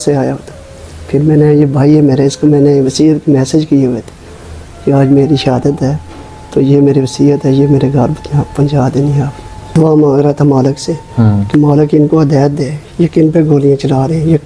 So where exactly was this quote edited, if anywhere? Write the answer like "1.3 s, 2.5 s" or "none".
9.7 s